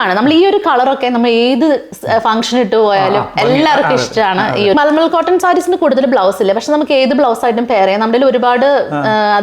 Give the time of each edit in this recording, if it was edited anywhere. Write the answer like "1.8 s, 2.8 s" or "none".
4.7 s

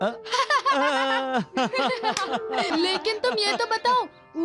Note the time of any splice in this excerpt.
2.7 s

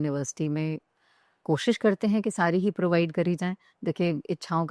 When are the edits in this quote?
none

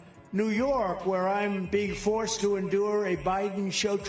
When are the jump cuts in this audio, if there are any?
none

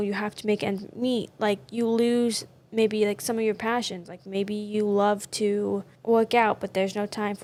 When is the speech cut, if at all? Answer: none

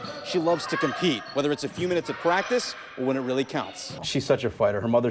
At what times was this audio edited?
4.0 s

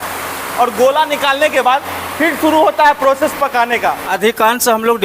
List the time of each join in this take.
4.1 s

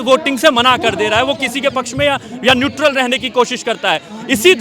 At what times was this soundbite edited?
none

